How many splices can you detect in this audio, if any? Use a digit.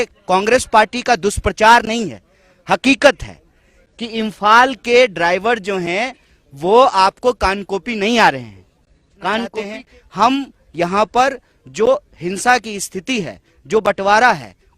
1